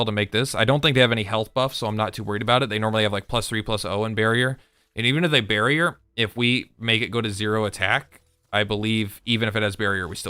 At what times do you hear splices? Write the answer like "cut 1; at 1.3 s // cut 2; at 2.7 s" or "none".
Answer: none